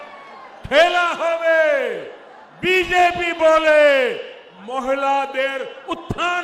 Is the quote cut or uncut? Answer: uncut